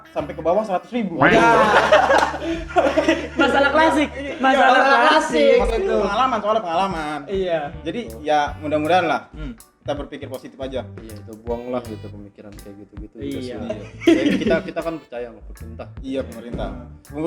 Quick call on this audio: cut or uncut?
uncut